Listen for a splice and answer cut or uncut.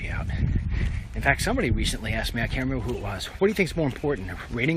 cut